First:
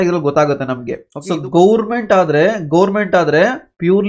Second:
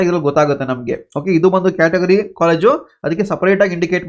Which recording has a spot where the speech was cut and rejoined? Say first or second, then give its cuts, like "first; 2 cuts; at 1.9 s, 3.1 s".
first; 1 cut; at 1.1 s